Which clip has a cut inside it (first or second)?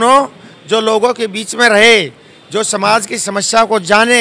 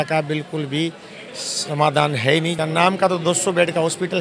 second